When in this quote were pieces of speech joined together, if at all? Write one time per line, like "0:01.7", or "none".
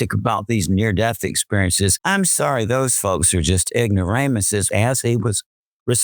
0:02.0
0:04.7